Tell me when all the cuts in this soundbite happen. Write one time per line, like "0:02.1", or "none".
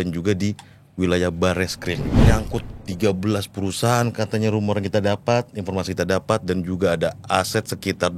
0:02.2